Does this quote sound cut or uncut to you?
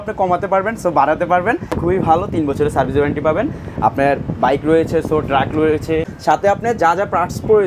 cut